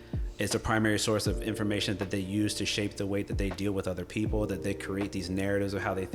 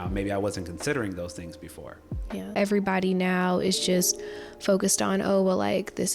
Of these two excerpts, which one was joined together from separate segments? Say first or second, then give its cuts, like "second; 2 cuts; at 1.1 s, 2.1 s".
second; 1 cut; at 2.5 s